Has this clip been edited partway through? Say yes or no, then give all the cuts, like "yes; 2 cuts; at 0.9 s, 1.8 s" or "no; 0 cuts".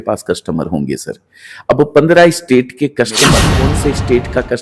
yes; 1 cut; at 3.5 s